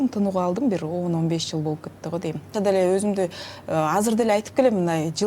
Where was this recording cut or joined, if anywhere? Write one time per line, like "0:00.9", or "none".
0:02.5